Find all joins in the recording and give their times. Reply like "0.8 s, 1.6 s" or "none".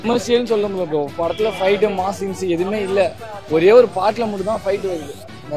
none